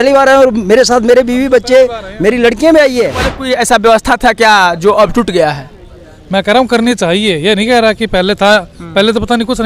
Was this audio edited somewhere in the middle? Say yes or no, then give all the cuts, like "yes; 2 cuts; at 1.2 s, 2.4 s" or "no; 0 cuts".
yes; 1 cut; at 3.4 s